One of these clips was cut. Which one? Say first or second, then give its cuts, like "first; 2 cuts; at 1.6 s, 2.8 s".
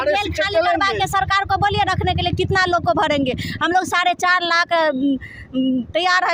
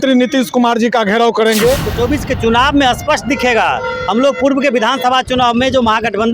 second; 1 cut; at 1.9 s